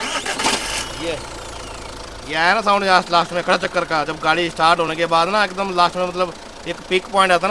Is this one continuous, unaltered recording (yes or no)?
yes